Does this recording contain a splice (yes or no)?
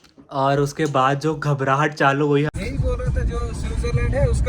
yes